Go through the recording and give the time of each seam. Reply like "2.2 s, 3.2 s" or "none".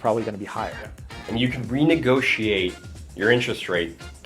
1.2 s